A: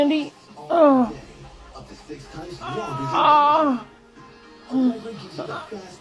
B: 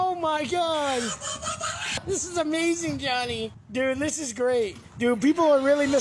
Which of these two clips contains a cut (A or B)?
B